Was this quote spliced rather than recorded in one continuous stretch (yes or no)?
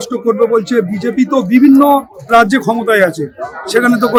no